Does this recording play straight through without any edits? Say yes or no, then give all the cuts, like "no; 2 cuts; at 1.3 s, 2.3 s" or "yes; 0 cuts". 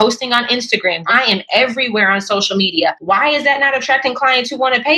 no; 2 cuts; at 1.1 s, 3.0 s